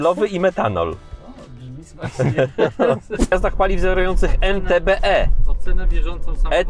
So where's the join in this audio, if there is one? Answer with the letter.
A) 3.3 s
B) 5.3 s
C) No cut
A